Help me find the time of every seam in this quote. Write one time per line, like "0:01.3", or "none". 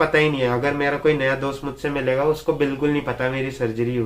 none

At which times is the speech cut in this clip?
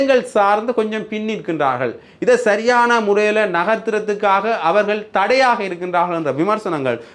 none

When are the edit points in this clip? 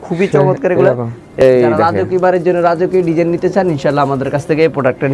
0:01.4

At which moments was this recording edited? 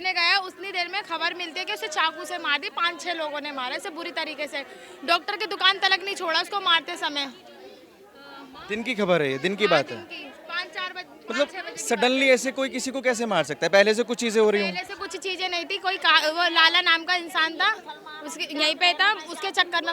none

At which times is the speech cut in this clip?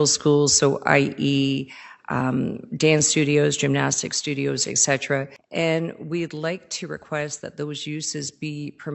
0:05.4

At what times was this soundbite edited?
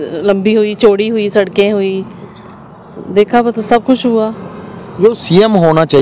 none

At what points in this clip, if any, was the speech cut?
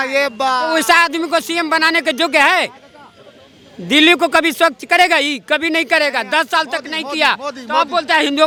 none

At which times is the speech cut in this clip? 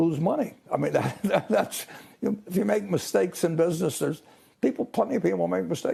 none

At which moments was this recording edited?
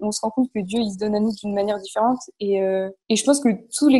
none

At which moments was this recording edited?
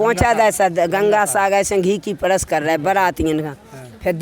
none

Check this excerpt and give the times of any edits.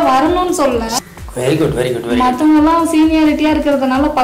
0:00.9

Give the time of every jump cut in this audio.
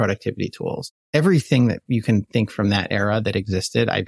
0:00.9

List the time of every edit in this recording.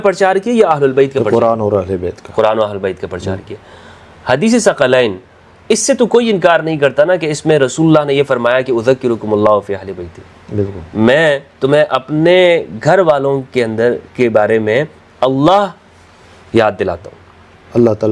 none

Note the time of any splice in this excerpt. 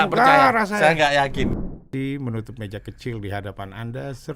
0:01.6

